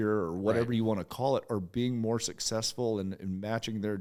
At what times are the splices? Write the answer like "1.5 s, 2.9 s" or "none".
none